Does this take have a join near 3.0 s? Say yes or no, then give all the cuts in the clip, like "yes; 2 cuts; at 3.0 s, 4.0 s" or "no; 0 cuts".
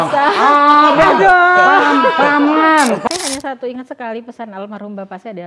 yes; 1 cut; at 3.0 s